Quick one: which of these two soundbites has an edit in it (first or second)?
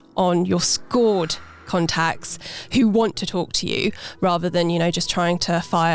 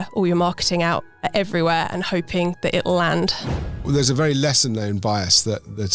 second